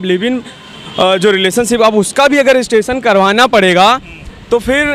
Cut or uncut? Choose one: uncut